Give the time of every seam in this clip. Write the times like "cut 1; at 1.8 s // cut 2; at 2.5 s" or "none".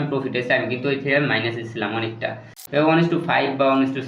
cut 1; at 2.5 s

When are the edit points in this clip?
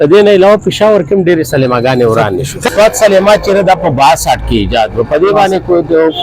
cut 1; at 2.7 s

